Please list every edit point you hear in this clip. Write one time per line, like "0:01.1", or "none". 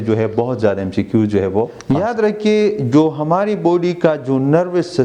0:01.8

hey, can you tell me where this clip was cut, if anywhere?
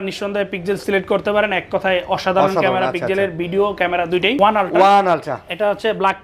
0:04.4

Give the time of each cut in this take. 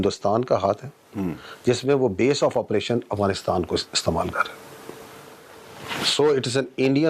none

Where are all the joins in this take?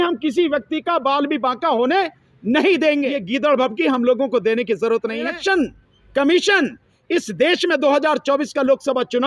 0:03.2
0:05.3

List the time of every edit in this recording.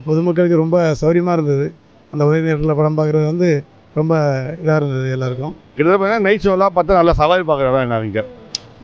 0:05.8

